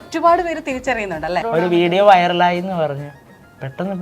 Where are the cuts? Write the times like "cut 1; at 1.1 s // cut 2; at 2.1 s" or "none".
cut 1; at 1.4 s